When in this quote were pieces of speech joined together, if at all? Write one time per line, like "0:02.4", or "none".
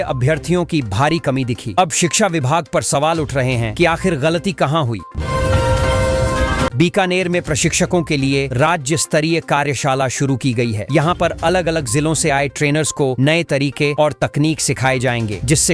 0:05.1
0:06.7

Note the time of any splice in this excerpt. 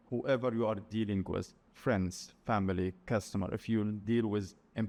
none

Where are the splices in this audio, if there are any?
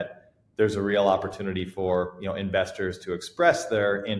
none

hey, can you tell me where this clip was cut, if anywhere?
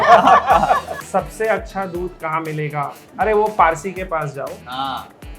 0:00.9
0:03.0

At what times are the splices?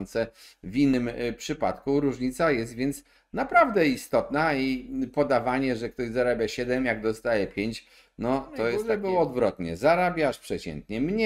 0:08.8

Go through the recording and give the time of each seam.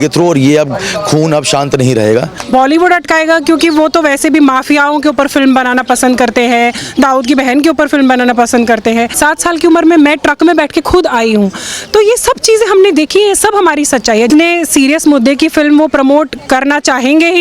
0:02.4
0:09.1
0:14.3

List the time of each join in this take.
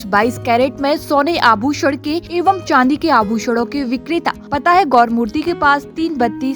0:02.2
0:04.4

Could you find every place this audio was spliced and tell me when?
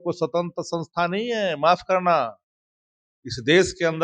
none

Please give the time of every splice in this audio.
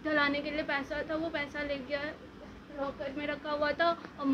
none

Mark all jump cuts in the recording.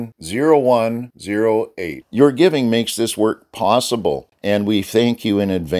0:04.3

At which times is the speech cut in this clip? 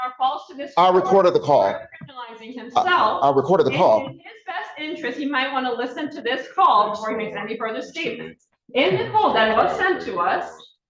none

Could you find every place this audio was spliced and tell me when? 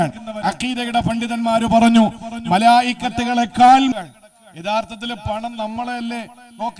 0:03.9

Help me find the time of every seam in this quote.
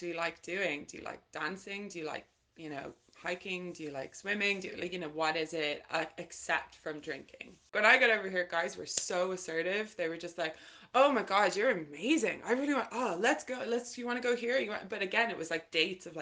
0:07.7

